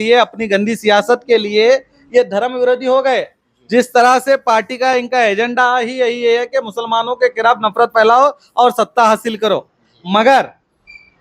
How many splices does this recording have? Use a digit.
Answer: 0